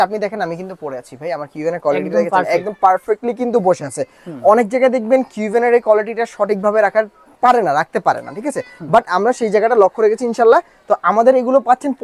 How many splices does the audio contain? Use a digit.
0